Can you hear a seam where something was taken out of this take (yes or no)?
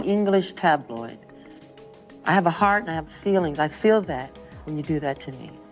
no